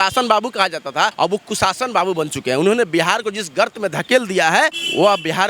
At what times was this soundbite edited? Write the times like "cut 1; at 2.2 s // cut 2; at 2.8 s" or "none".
cut 1; at 1.1 s